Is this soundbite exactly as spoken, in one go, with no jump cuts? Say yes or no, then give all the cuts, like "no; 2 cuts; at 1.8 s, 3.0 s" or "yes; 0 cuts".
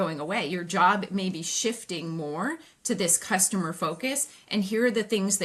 yes; 0 cuts